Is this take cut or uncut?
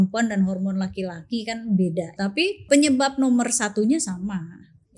cut